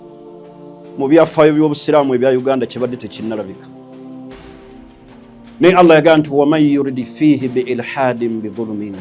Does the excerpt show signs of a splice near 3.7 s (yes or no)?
yes